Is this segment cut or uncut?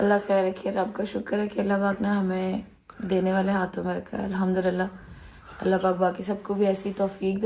uncut